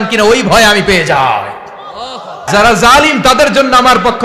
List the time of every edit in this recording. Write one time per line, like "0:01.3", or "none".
0:02.5